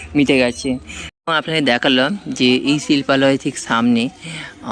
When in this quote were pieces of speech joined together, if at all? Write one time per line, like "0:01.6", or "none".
0:01.0